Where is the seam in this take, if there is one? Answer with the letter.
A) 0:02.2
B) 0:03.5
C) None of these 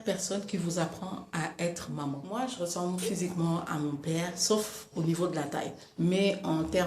A